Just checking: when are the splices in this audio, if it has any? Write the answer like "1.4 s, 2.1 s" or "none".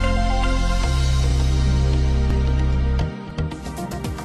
none